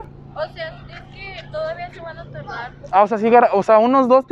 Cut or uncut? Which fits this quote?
uncut